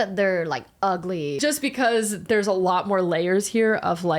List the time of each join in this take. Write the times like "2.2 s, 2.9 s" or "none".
1.4 s